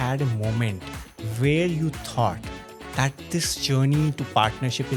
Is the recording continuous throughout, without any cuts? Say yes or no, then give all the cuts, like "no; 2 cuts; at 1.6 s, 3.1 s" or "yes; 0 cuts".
yes; 0 cuts